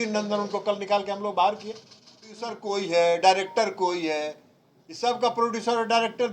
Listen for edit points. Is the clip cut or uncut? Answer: cut